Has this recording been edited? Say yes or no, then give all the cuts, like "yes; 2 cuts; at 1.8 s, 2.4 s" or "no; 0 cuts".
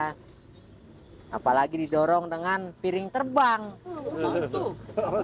no; 0 cuts